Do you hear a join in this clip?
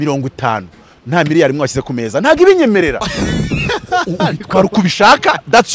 no; 0 cuts

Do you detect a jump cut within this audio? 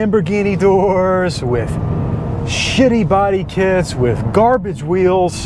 no; 0 cuts

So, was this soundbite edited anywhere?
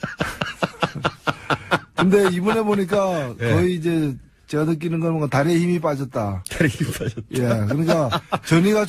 no; 0 cuts

